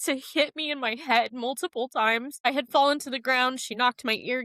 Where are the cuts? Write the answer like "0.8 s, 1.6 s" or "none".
2.3 s